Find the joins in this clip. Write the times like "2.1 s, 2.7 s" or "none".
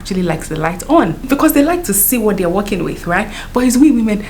1.2 s